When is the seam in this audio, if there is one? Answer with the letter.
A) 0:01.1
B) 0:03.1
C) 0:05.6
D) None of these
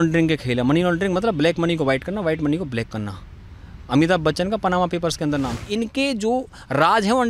C